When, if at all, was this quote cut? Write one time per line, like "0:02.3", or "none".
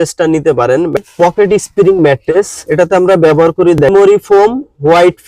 0:01.0
0:02.6
0:03.9